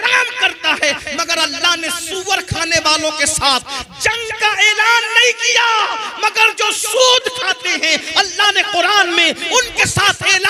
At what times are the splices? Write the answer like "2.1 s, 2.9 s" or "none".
none